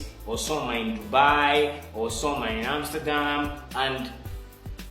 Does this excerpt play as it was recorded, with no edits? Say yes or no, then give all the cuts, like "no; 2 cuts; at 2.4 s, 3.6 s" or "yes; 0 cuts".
yes; 0 cuts